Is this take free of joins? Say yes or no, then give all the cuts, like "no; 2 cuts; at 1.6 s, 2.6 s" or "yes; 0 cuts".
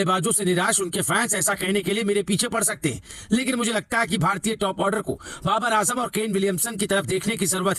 yes; 0 cuts